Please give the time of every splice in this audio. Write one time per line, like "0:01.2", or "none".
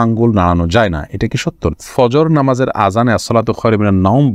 0:01.7